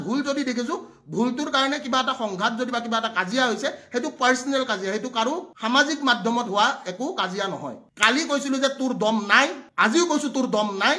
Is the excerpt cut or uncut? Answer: cut